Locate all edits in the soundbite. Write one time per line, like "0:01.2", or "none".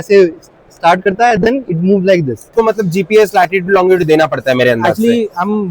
0:02.4